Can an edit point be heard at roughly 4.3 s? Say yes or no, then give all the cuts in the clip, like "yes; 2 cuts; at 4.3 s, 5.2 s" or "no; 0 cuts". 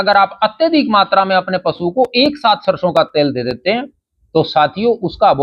no; 0 cuts